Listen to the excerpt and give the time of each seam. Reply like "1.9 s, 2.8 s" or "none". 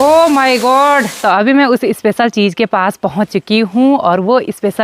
1.1 s